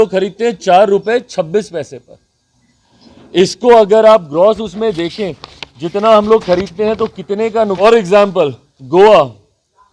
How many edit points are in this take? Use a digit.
1